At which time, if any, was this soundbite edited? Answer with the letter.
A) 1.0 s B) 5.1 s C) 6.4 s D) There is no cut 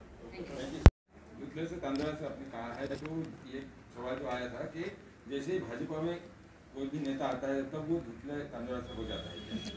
A